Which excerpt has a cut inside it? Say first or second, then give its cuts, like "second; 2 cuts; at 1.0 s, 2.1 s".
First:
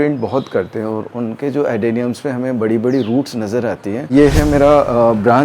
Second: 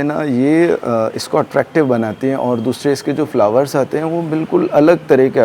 first; 1 cut; at 4.1 s